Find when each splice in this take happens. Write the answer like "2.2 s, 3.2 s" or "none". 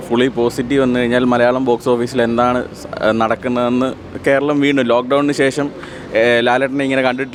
none